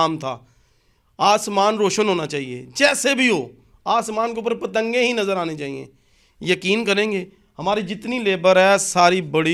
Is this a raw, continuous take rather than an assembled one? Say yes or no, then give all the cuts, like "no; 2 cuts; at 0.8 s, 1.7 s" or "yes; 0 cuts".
yes; 0 cuts